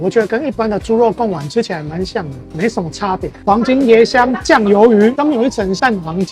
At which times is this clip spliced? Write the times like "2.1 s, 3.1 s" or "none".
3.4 s, 5.2 s